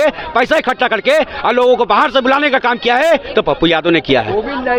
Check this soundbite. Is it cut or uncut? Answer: uncut